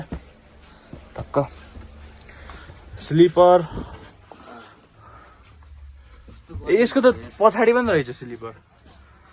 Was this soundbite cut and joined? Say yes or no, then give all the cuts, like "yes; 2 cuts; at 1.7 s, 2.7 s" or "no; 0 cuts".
no; 0 cuts